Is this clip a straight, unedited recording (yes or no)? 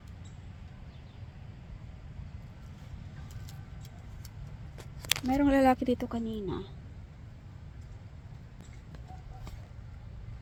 yes